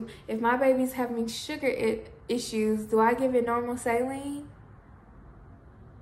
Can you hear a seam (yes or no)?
no